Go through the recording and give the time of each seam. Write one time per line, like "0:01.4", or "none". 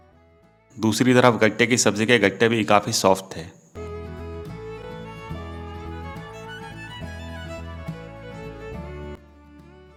none